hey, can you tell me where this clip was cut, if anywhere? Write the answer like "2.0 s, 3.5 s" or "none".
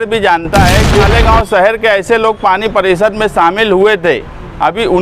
1.1 s